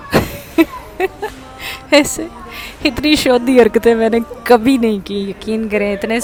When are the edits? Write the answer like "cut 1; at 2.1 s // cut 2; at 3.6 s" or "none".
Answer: none